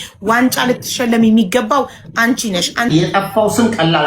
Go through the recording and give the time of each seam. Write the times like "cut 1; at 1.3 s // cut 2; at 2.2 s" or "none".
cut 1; at 2.9 s